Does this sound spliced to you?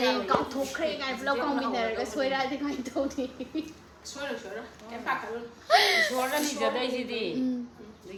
no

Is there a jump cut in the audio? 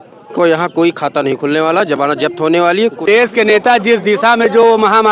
yes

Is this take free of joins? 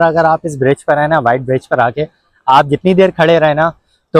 yes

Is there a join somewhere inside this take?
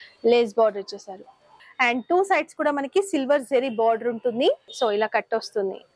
yes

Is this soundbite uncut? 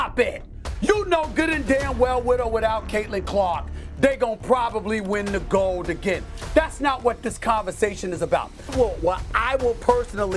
no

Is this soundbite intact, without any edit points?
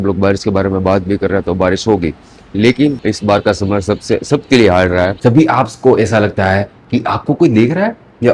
no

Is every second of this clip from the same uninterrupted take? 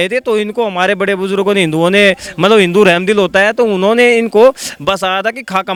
yes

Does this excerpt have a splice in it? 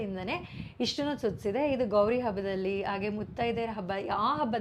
no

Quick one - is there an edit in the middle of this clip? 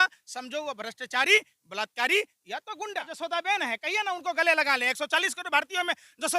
yes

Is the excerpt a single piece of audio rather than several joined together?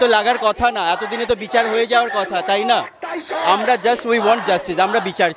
yes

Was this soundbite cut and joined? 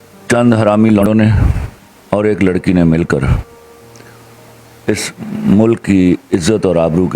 yes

